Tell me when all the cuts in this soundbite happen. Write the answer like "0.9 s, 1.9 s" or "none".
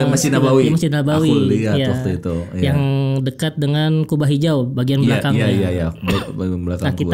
none